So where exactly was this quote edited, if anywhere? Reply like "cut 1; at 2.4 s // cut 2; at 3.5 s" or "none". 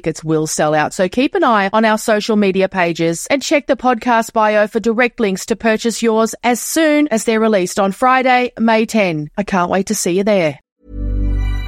cut 1; at 10.7 s